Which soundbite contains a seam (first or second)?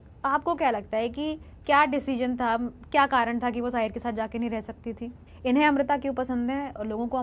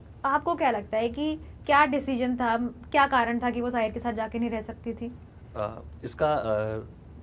first